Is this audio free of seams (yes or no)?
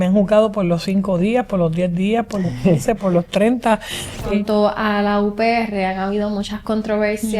no